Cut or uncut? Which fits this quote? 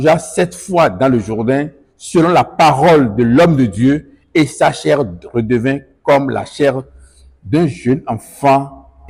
uncut